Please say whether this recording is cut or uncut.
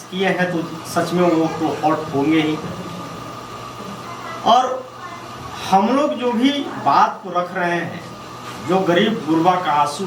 uncut